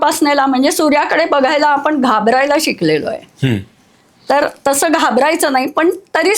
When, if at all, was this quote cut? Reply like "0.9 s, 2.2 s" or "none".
none